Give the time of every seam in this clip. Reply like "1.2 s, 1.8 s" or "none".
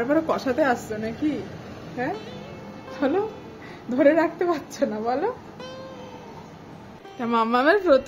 7.0 s